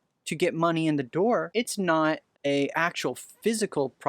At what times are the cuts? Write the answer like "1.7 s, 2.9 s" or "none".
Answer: 1.5 s, 2.3 s